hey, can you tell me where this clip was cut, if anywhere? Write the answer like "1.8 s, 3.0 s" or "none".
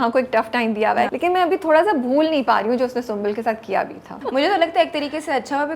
1.1 s, 4.2 s